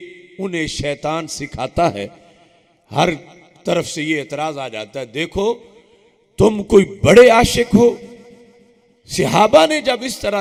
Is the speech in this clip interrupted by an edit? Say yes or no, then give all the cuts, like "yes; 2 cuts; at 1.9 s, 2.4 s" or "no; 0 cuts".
no; 0 cuts